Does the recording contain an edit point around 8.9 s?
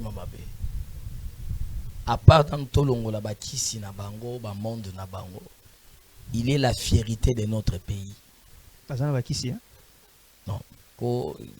no; 0 cuts

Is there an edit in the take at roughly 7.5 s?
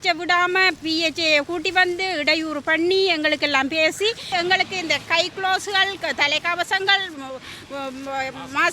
no; 1 cut; at 4.3 s

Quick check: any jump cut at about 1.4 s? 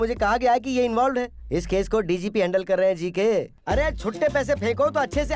no; 1 cut; at 3.5 s

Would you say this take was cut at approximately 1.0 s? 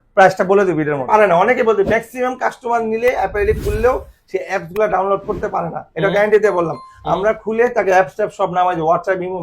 yes; 1 cut; at 1.0 s

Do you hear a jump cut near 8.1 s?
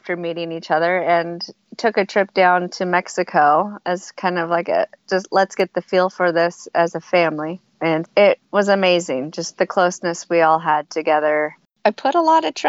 yes; 2 cuts; at 8.1 s, 11.6 s

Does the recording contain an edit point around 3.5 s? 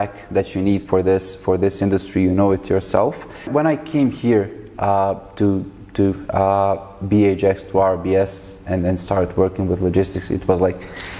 yes; 1 cut; at 3.5 s

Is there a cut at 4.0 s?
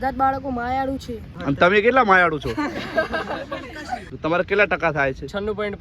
yes; 2 cuts; at 1.3 s, 4.0 s

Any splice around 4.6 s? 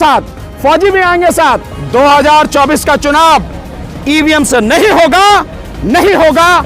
no; 1 cut; at 1.7 s

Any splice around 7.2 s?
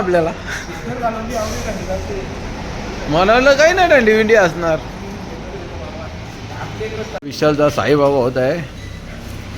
yes; 1 cut; at 7.2 s

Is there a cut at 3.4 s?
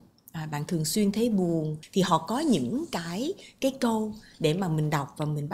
no; 1 cut; at 1.8 s

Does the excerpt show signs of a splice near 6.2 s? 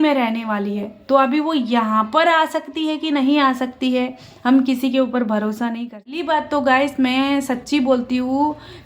yes; 1 cut; at 6.2 s

